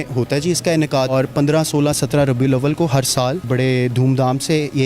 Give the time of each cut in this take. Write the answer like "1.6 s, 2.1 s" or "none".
1.1 s, 3.5 s